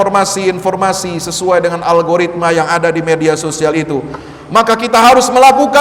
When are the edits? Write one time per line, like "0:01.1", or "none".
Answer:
none